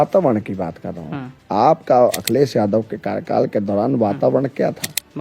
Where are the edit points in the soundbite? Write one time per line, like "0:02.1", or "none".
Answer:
none